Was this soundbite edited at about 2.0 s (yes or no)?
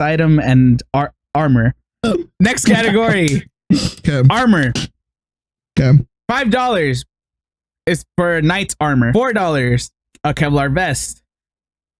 yes